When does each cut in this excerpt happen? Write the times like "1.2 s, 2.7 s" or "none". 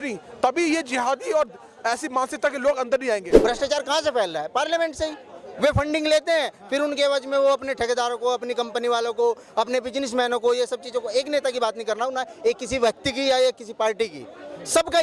3.3 s